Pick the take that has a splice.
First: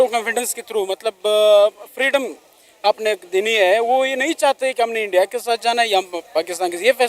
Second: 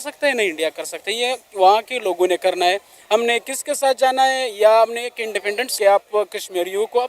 second; 1 cut; at 5.7 s

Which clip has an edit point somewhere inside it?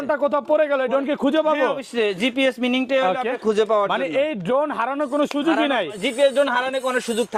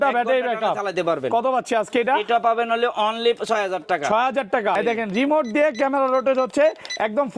second; 1 cut; at 4.8 s

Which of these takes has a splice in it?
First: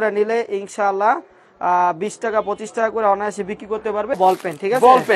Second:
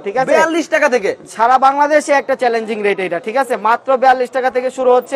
first; 1 cut; at 4.2 s

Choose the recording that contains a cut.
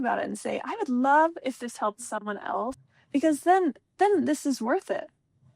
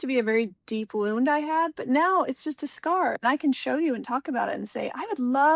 first; 1 cut; at 2.9 s

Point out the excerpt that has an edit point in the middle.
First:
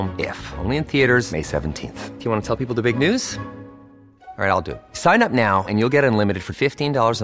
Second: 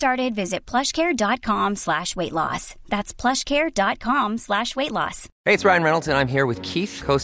second; 1 cut; at 5.2 s

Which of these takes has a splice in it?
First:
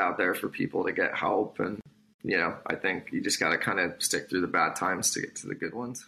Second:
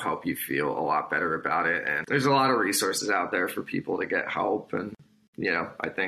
second; 1 cut; at 2.0 s

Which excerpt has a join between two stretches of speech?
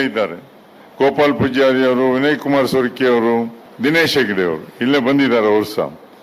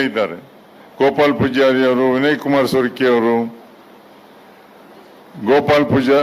first; 1 cut; at 3.6 s

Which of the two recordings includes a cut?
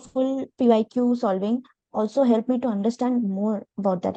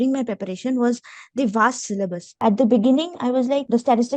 second; 1 cut; at 2.3 s

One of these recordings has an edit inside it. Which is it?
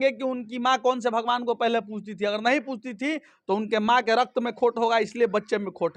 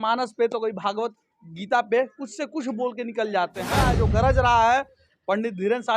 second; 1 cut; at 3.8 s

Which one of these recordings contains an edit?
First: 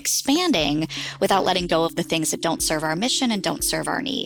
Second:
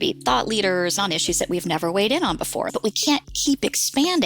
second; 2 cuts; at 1.0 s, 2.7 s

